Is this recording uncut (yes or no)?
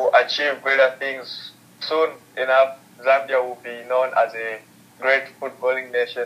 yes